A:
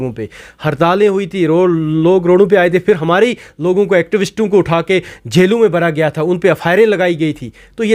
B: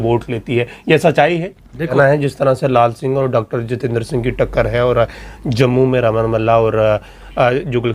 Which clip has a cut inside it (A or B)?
B